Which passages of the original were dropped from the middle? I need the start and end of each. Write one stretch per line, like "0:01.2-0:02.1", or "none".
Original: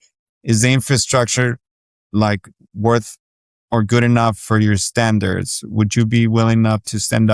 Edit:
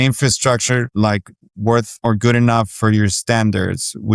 0:01.6-0:02.1
0:03.1-0:03.6